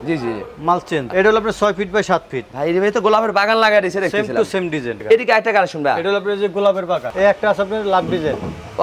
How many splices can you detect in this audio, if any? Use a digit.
3